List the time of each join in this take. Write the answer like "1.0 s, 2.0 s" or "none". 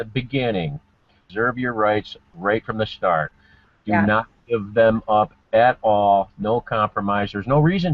1.2 s